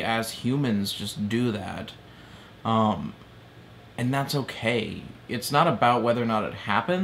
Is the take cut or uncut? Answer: uncut